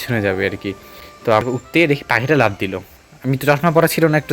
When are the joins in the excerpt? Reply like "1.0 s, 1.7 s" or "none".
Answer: 1.2 s